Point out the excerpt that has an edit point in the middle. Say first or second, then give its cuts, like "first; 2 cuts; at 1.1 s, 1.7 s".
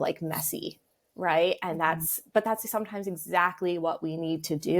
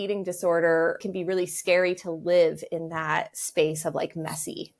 second; 1 cut; at 1.0 s